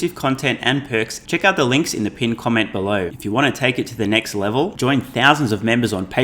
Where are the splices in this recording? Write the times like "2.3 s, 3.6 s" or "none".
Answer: 1.2 s, 3.1 s